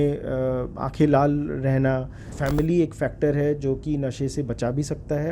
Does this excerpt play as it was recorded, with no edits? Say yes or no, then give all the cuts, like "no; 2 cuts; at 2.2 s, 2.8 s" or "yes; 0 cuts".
no; 1 cut; at 2.2 s